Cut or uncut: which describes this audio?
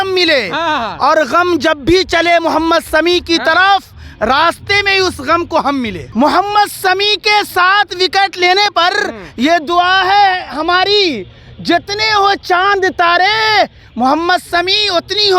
cut